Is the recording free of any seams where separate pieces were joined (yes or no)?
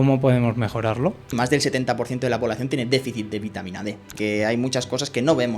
no